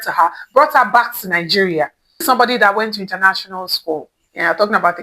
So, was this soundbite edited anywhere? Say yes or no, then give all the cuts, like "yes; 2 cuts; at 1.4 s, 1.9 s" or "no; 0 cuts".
yes; 1 cut; at 2.2 s